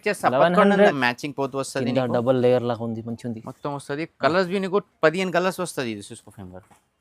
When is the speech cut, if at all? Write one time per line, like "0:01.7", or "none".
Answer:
0:01.0